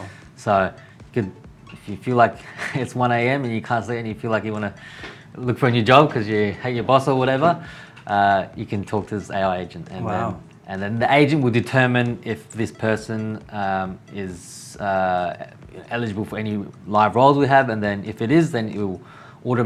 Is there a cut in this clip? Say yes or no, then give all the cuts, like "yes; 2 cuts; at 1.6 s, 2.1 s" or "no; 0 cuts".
no; 0 cuts